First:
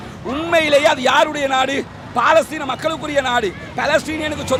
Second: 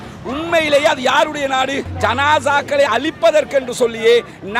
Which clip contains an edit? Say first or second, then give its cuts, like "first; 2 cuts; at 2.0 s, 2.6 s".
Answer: second; 1 cut; at 1.9 s